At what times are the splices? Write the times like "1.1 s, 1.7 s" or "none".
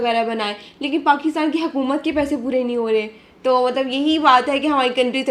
none